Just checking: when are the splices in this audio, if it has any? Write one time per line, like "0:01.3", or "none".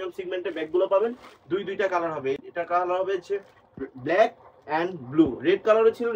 none